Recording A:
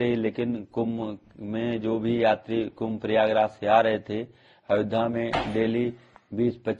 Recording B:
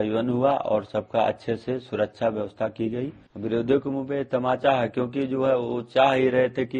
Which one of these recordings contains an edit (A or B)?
B